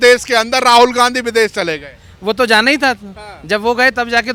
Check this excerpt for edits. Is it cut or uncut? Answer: uncut